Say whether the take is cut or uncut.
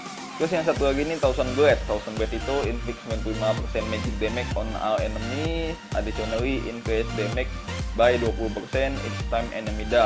uncut